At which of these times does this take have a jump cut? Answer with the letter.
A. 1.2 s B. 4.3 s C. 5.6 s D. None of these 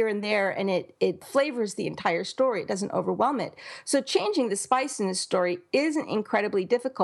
A